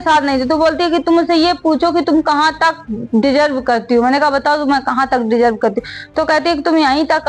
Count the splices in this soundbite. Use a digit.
0